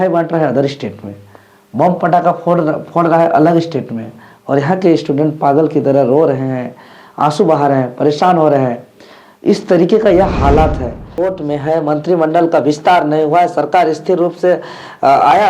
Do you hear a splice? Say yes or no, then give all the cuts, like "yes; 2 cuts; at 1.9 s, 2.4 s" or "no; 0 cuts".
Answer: yes; 1 cut; at 11.1 s